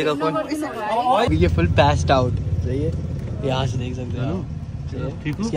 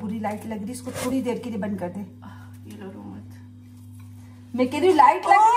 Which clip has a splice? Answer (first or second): first